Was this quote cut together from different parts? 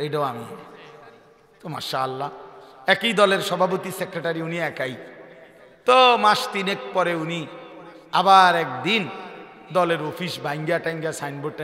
no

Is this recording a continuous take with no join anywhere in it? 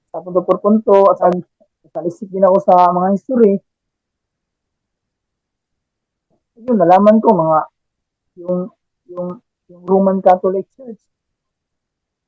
no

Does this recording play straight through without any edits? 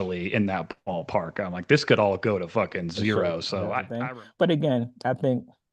no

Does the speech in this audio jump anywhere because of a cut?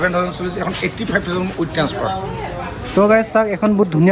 no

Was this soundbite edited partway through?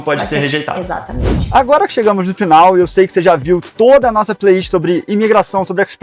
no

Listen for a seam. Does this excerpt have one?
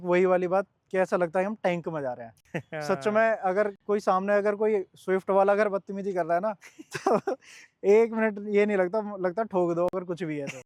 no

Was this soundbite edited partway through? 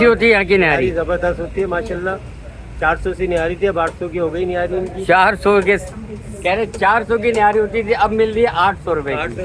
no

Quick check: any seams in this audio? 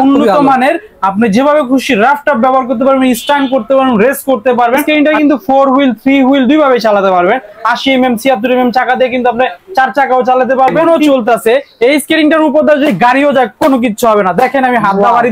yes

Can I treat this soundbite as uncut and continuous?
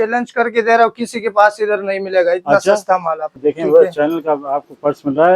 no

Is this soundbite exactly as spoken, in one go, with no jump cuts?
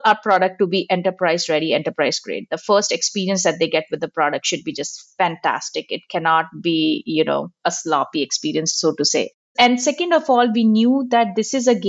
no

